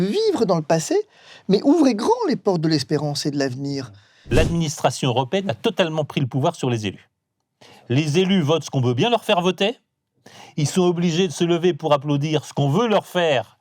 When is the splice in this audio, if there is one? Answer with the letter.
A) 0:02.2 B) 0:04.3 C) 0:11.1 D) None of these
B